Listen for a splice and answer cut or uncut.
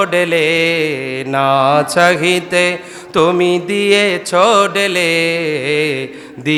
uncut